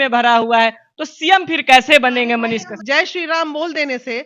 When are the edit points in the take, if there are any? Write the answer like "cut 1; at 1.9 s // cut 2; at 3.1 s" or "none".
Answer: cut 1; at 2.7 s